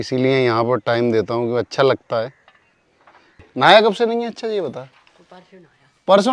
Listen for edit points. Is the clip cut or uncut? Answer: cut